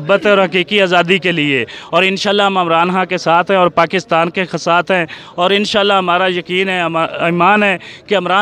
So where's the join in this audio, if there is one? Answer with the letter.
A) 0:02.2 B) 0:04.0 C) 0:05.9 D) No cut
D